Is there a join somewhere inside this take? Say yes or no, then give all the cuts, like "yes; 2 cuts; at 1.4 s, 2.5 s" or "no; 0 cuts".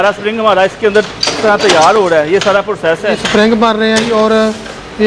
yes; 1 cut; at 3.2 s